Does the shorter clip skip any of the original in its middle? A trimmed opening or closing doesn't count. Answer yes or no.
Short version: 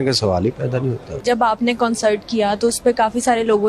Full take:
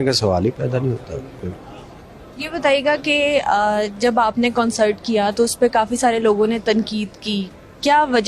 yes